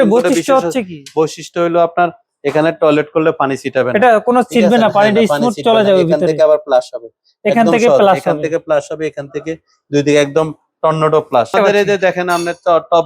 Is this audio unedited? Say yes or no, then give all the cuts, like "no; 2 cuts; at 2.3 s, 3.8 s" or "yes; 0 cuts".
no; 1 cut; at 11.6 s